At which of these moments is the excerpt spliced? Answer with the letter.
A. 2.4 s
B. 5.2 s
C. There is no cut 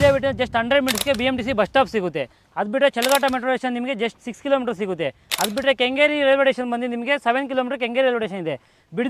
C